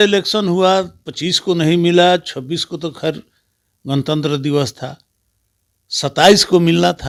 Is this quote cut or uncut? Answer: uncut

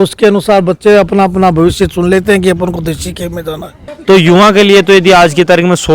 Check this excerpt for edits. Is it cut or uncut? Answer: cut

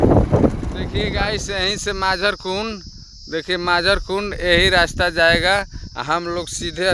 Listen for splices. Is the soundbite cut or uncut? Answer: cut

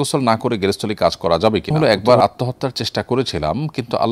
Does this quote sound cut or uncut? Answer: cut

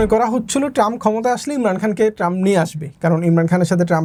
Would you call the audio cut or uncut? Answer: uncut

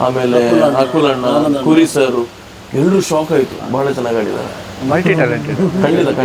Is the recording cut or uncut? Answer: cut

